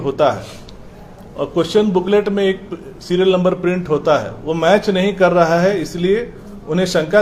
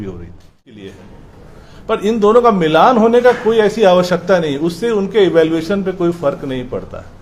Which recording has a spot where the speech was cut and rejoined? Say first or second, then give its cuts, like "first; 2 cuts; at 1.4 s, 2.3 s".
second; 1 cut; at 0.9 s